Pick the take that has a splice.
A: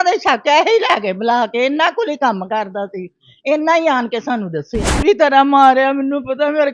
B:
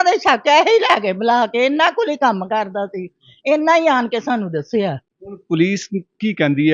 A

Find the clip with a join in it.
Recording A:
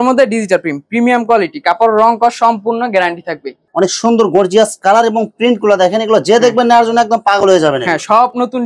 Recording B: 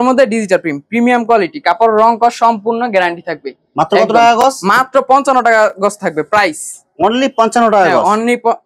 A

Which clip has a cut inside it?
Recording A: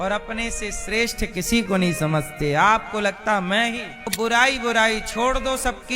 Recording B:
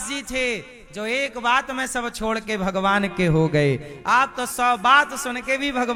A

